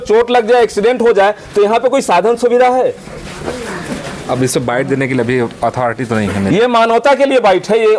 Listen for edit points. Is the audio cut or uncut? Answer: uncut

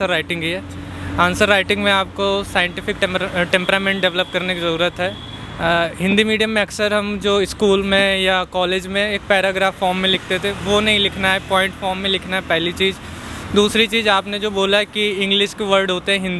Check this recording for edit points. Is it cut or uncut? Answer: uncut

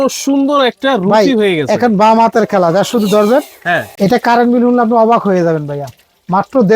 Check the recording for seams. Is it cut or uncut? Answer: cut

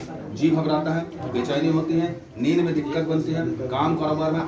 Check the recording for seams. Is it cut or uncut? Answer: uncut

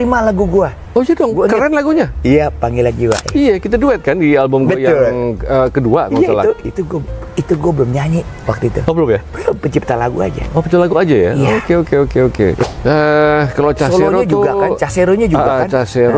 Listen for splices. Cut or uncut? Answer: cut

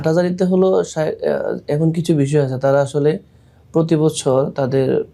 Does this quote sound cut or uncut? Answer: uncut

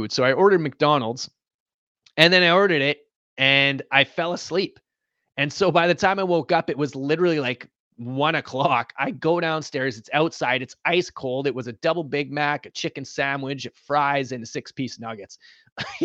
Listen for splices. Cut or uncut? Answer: uncut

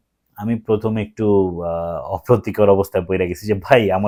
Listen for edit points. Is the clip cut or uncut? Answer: uncut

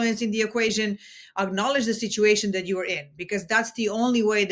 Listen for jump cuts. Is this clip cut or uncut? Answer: uncut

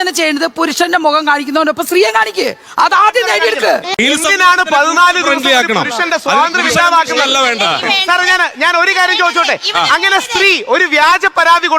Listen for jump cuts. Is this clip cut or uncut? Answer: cut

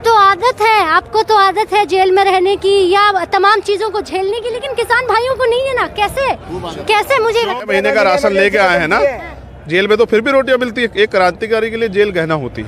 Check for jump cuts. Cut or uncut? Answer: cut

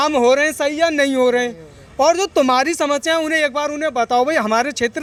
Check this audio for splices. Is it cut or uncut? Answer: uncut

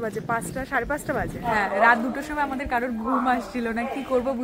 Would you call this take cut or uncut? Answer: cut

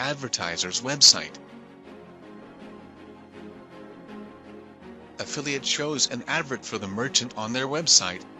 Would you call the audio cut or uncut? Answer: cut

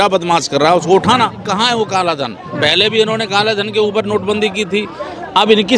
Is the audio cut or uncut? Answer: cut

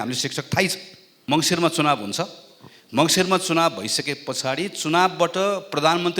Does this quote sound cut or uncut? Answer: cut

